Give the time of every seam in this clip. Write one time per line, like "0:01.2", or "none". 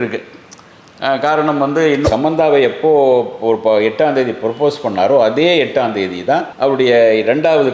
0:02.1